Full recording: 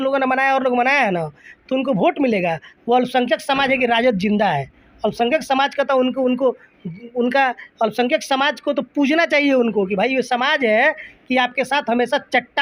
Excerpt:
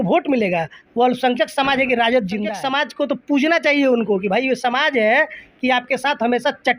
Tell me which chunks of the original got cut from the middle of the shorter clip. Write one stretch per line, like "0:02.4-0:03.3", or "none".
0:04.4-0:08.2